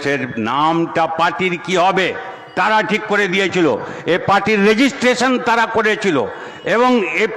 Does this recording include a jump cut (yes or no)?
no